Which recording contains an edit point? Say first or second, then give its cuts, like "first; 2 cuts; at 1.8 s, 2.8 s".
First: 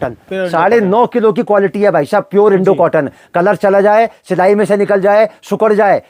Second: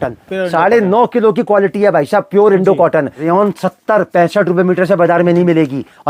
second; 1 cut; at 3.2 s